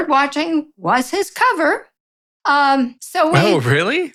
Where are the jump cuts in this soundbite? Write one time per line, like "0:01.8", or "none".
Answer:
none